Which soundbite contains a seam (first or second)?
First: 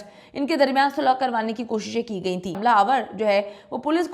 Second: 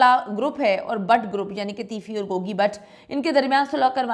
first